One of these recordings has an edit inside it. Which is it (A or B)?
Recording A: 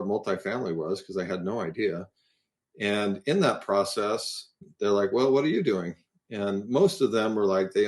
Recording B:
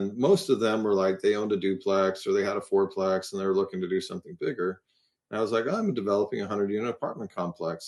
A